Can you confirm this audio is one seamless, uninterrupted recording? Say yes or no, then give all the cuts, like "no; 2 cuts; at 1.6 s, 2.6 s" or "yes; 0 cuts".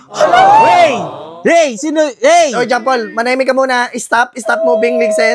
yes; 0 cuts